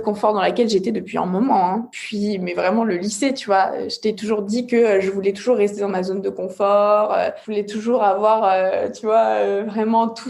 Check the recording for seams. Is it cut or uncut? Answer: cut